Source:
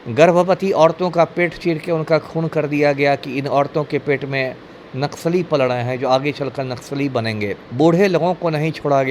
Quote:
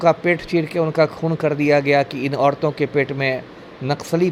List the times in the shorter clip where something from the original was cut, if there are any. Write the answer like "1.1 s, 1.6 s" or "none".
none